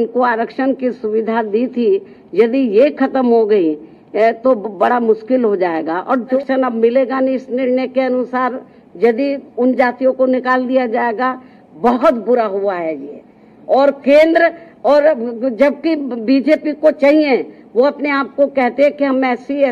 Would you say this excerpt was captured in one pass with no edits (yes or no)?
no